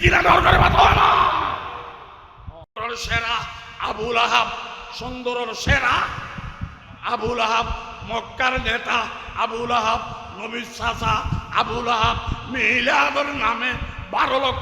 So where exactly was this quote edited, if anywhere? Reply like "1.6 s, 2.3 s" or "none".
2.8 s

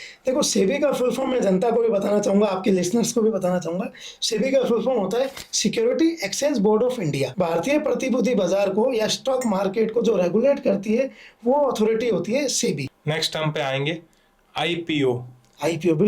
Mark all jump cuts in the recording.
7.3 s, 12.9 s

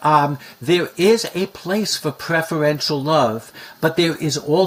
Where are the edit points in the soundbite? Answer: none

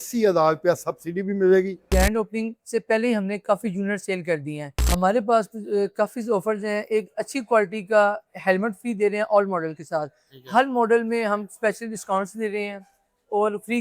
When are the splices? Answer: 1.8 s, 4.7 s

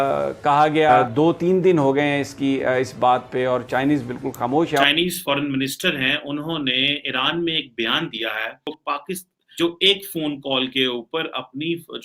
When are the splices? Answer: 1.1 s, 4.8 s, 9.1 s

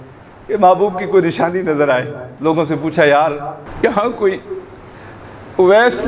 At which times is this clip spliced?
2.2 s, 3.6 s

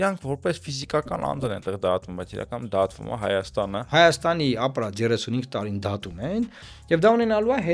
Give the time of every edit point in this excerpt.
3.8 s

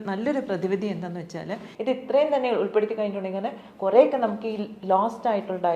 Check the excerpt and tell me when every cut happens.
1.6 s

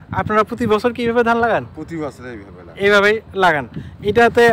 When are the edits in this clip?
none

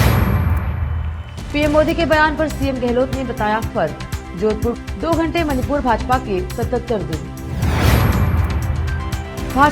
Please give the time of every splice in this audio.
1.2 s

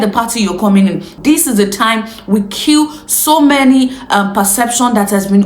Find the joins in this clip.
1.1 s

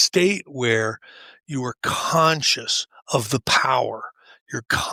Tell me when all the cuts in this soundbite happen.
none

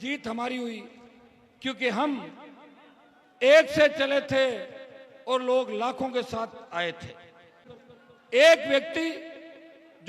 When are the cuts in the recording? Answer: 7.6 s

